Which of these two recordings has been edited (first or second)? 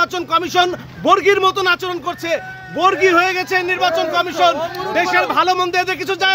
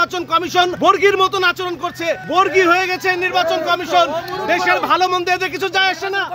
second